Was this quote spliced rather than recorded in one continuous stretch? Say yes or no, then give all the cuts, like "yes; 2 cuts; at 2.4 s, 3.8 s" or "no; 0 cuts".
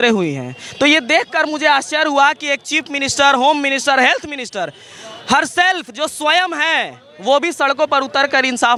no; 0 cuts